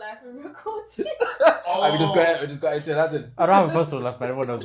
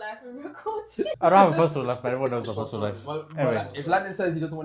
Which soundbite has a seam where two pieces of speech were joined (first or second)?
second